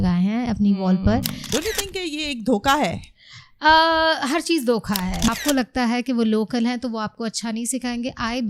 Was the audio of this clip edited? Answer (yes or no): yes